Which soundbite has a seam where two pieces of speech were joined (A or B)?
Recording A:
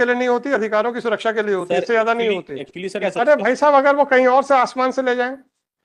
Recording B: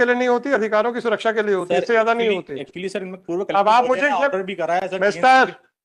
A